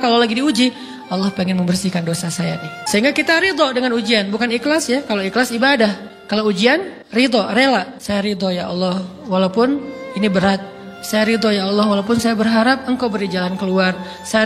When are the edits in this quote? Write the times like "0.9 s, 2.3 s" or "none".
2.7 s, 6.1 s, 7.0 s, 8.0 s